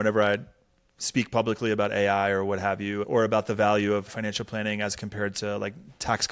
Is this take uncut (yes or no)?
no